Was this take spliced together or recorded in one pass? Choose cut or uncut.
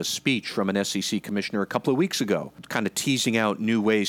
cut